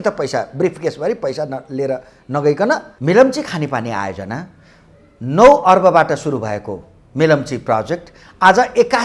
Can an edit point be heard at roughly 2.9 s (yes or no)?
yes